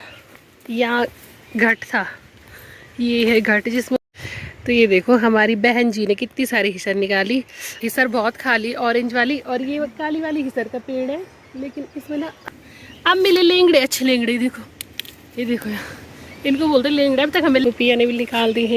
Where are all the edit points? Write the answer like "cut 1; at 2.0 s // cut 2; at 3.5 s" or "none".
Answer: cut 1; at 4.0 s // cut 2; at 7.6 s // cut 3; at 12.4 s // cut 4; at 17.6 s